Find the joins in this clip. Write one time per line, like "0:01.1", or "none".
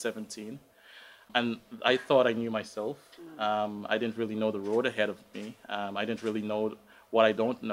0:01.3